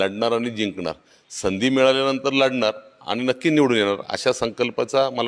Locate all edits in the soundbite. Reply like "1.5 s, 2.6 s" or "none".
none